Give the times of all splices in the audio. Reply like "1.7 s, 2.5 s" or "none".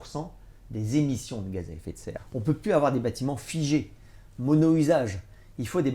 2.2 s